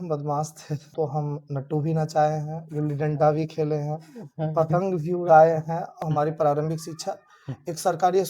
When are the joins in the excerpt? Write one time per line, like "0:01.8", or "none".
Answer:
0:00.9
0:05.8